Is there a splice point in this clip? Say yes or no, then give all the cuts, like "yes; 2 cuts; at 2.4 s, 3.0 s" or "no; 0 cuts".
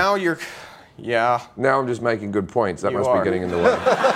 no; 0 cuts